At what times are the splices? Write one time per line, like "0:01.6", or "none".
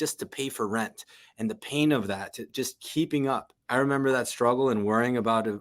0:03.5